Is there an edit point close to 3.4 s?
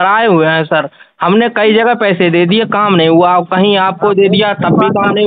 no; 0 cuts

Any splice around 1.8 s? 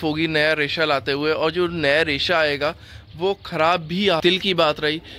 no; 1 cut; at 4.2 s

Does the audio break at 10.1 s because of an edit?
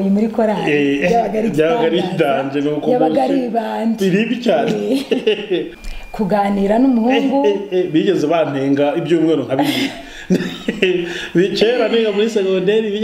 no; 1 cut; at 5.7 s

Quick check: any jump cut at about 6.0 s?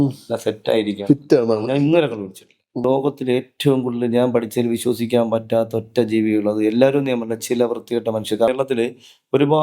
no; 2 cuts; at 2.8 s, 8.5 s

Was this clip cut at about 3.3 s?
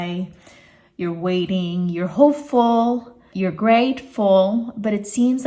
yes; 1 cut; at 3.3 s

